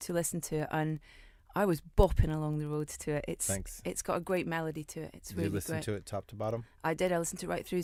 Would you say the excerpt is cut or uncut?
uncut